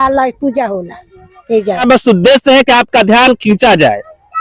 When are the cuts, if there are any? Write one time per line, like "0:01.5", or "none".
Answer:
none